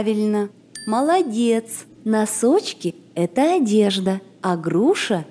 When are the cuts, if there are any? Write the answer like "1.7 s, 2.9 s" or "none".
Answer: none